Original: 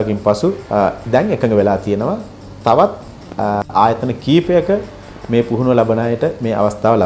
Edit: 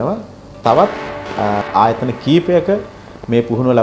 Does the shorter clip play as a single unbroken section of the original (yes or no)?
yes